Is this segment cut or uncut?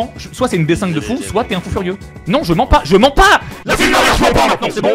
uncut